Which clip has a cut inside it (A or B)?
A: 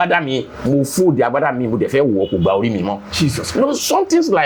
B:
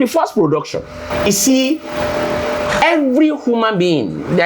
B